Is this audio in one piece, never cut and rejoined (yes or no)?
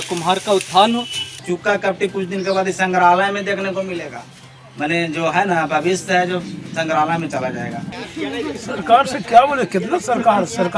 no